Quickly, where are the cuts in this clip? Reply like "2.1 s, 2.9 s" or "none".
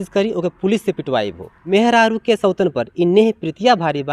1.5 s